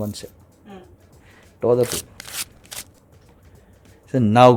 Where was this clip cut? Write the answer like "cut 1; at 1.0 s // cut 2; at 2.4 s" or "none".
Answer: none